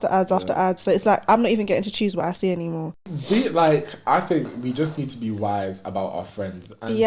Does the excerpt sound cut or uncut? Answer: cut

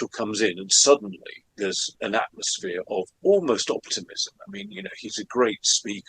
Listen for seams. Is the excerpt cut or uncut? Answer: cut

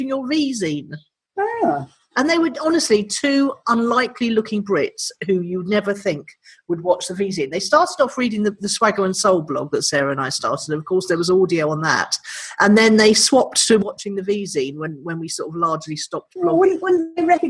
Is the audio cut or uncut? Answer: uncut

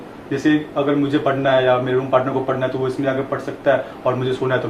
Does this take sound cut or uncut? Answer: uncut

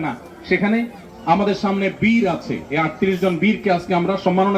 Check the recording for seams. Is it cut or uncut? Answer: cut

